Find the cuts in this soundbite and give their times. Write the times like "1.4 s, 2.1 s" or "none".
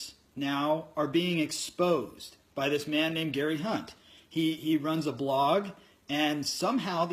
1.3 s